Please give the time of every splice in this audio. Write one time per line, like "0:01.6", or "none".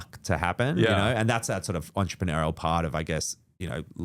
none